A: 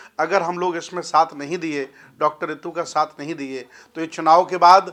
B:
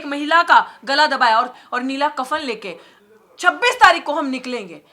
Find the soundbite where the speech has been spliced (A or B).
B